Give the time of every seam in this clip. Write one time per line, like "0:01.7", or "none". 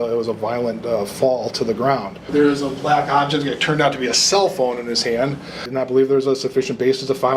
0:02.3
0:05.6